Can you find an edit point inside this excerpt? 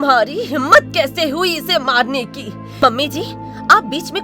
yes; 1 cut; at 2.6 s

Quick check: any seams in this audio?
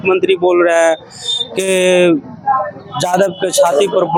no; 0 cuts

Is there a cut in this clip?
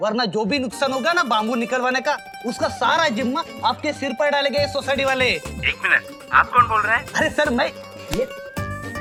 no; 0 cuts

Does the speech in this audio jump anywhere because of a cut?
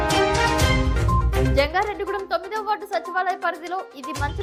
no; 0 cuts

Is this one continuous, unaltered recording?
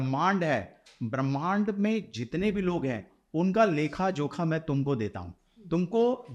yes; 0 cuts

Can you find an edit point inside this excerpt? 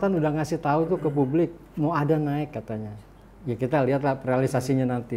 no; 0 cuts

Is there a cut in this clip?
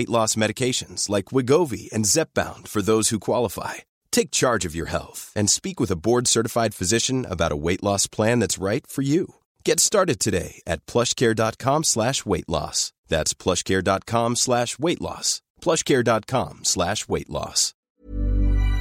yes; 1 cut; at 17.9 s

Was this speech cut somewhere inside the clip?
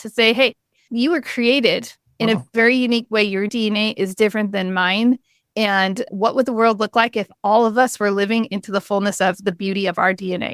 yes; 1 cut; at 3.5 s

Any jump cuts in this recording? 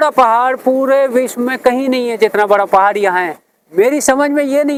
no; 0 cuts

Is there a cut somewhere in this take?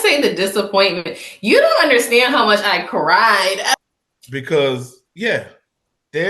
yes; 1 cut; at 3.7 s

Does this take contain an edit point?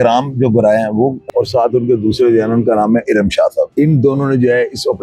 yes; 2 cuts; at 1.2 s, 3.7 s

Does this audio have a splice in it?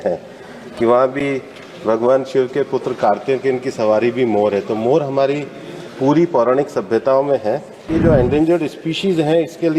yes; 1 cut; at 7.9 s

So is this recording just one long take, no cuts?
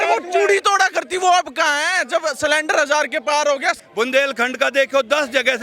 no; 1 cut; at 3.8 s

